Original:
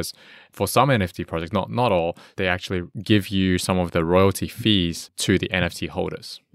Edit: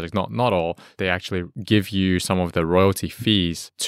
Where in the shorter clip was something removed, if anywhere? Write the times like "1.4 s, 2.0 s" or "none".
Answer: none